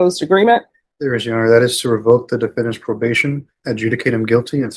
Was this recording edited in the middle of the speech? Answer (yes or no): no